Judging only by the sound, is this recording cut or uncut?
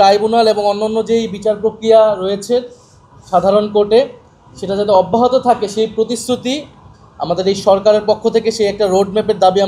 uncut